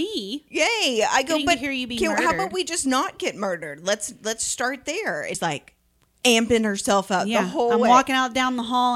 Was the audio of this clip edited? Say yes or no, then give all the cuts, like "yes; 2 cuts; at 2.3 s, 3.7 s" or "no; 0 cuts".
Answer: yes; 1 cut; at 5.4 s